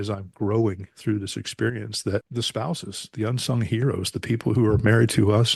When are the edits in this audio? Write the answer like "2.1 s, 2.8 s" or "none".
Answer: none